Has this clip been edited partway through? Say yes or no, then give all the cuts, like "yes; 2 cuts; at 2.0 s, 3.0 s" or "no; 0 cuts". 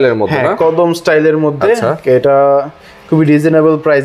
no; 0 cuts